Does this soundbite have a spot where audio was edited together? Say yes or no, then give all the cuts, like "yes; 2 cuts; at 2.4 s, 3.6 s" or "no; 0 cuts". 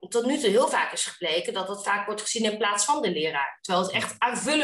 no; 0 cuts